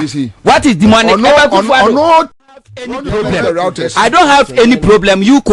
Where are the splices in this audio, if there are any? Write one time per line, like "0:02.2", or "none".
0:02.6